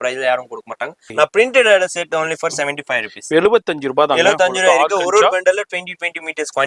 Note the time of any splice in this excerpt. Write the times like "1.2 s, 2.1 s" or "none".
1.1 s